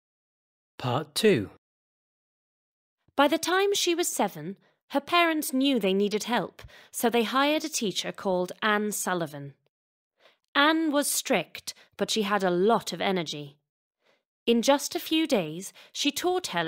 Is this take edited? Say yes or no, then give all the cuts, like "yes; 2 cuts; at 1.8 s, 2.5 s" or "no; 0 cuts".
yes; 1 cut; at 14.6 s